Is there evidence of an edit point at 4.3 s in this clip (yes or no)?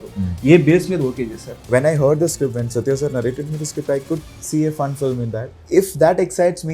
no